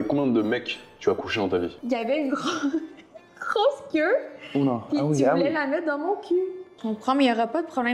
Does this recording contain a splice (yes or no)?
yes